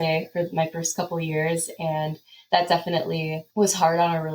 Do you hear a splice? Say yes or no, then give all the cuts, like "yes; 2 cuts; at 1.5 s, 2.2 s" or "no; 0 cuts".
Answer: yes; 1 cut; at 3.4 s